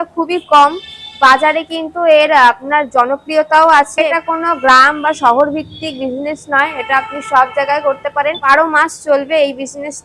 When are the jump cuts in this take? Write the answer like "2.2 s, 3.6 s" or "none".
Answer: 4.0 s, 8.4 s